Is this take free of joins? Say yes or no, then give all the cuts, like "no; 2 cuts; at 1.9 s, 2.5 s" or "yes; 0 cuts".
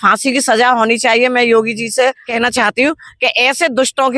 no; 1 cut; at 2.2 s